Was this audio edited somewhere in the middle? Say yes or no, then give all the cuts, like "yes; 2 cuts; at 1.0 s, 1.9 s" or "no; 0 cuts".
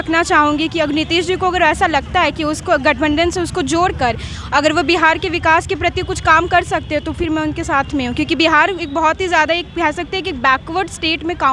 no; 0 cuts